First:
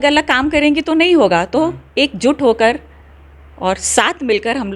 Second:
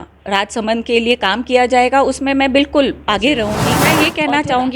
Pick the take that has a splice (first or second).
second